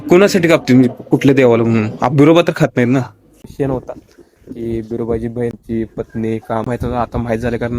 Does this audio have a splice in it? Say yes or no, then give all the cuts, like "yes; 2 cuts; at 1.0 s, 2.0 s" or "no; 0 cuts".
yes; 3 cuts; at 3.5 s, 5.6 s, 6.7 s